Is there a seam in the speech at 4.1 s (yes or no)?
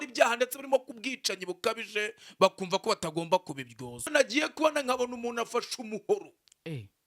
yes